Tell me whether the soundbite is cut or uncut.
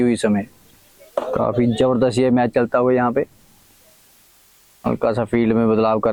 uncut